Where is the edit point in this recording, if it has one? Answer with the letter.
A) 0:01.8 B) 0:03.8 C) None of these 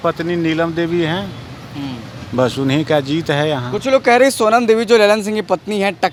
C